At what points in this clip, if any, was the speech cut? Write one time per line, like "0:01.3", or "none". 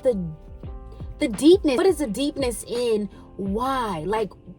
0:01.8